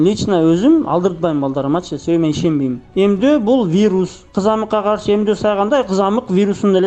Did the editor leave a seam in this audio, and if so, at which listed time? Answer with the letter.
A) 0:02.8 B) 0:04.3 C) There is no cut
A